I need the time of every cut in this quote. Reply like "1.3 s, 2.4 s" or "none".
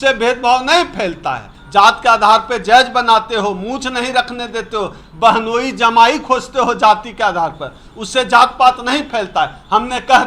1.5 s